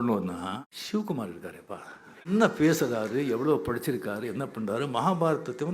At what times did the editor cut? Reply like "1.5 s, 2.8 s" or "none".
0.9 s, 2.3 s